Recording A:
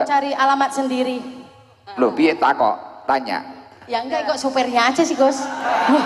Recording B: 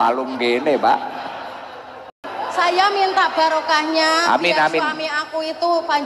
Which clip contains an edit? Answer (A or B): B